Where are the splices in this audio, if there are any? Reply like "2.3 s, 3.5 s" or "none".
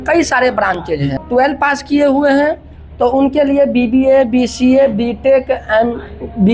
1.1 s